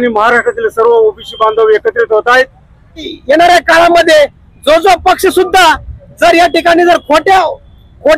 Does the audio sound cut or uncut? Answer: cut